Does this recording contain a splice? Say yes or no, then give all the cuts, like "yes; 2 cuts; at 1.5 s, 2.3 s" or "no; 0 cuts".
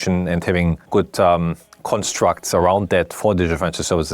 yes; 2 cuts; at 0.8 s, 3.1 s